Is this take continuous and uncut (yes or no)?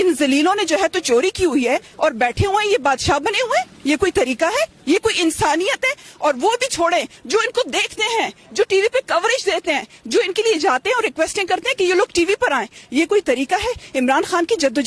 yes